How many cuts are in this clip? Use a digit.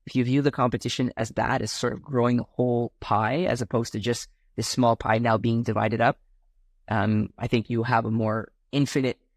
0